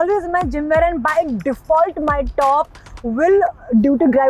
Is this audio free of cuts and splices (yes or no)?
yes